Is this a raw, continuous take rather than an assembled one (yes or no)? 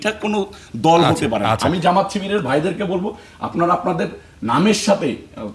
yes